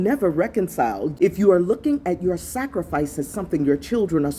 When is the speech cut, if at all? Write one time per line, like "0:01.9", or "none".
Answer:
0:01.1